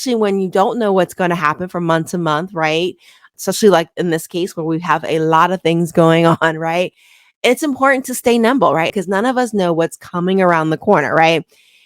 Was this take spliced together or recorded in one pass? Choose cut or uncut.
uncut